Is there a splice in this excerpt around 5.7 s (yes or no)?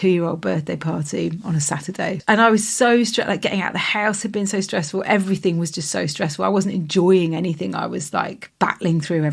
no